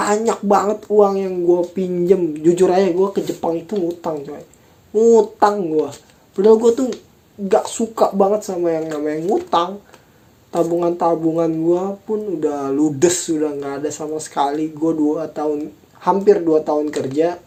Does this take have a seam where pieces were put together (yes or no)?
no